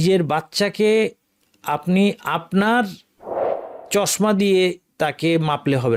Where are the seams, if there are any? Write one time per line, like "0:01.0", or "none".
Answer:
none